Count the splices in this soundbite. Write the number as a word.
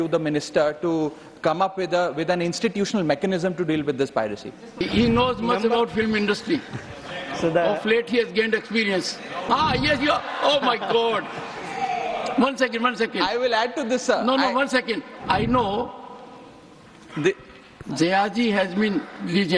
three